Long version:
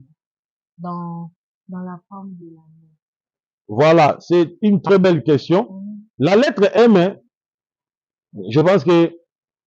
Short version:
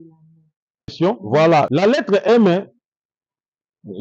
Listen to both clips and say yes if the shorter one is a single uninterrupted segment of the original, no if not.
no